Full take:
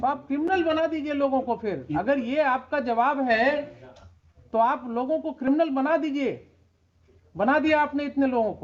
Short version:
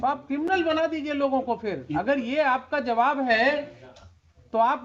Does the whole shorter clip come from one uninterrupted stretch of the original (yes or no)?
yes